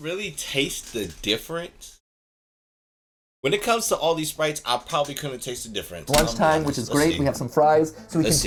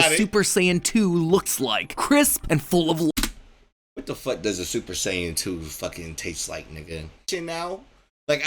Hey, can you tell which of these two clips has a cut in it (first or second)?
second